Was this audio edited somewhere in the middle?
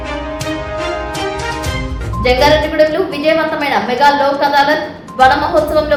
no; 0 cuts

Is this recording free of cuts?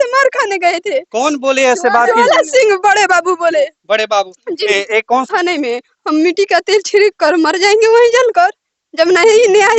no; 1 cut; at 5.3 s

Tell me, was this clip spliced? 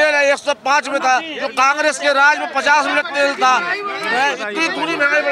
no; 0 cuts

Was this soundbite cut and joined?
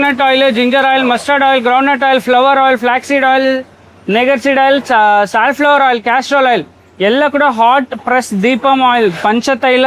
no; 0 cuts

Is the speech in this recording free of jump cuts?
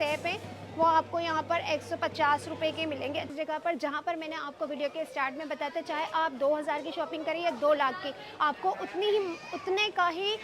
no; 1 cut; at 3.3 s

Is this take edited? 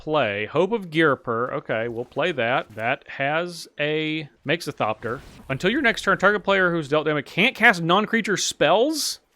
yes; 3 cuts; at 2.7 s, 4.3 s, 5.3 s

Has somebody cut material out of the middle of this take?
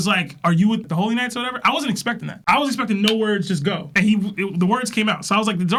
no; 0 cuts

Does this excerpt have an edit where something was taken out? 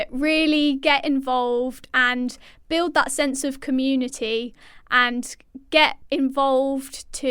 yes; 1 cut; at 4.7 s

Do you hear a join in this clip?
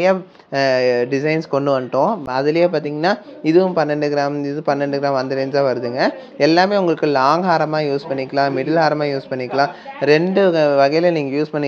no; 0 cuts

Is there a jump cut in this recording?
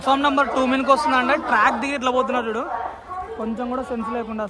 no; 0 cuts

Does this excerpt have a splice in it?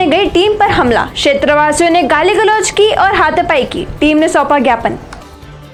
no; 0 cuts

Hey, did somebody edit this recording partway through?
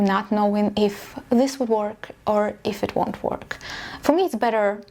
no; 0 cuts

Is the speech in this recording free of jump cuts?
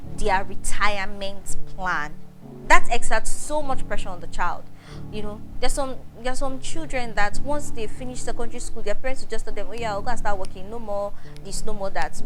yes; 0 cuts

